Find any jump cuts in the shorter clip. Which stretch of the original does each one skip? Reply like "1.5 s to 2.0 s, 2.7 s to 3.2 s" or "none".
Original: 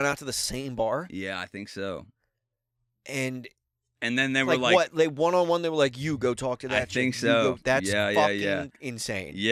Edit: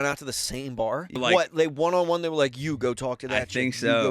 1.2 s to 4.6 s